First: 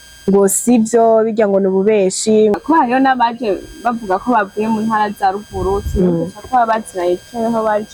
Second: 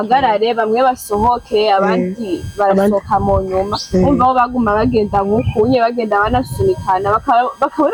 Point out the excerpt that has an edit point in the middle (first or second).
first